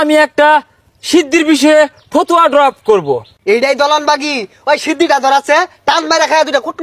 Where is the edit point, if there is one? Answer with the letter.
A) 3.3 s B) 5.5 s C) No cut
A